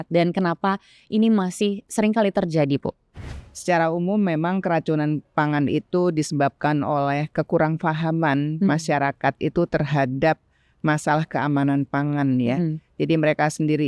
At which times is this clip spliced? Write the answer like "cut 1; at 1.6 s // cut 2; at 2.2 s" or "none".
cut 1; at 3.3 s